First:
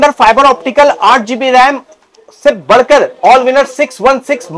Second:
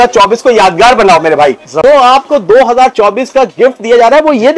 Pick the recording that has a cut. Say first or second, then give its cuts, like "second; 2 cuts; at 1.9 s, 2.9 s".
second; 1 cut; at 1.7 s